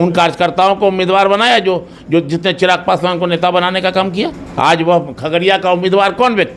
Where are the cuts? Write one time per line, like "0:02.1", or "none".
0:04.4